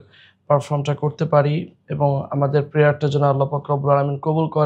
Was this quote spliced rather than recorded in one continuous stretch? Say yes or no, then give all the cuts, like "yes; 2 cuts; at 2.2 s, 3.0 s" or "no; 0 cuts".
no; 0 cuts